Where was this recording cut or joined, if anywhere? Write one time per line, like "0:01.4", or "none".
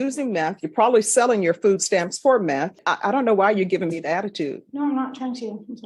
0:02.8